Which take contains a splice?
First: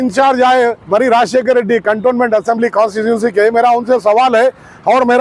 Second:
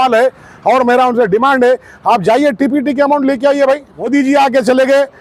second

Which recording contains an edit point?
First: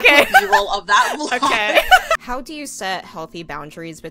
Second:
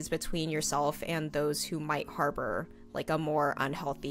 first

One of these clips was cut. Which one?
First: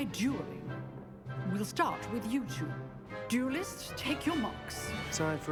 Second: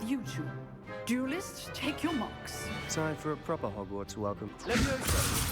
second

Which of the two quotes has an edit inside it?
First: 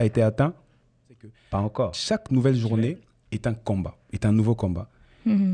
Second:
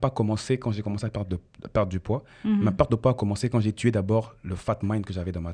first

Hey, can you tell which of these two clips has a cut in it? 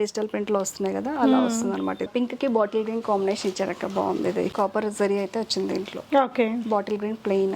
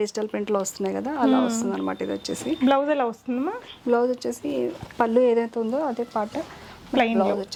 first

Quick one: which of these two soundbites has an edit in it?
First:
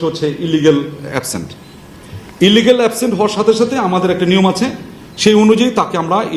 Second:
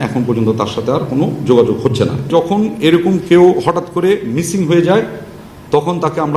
second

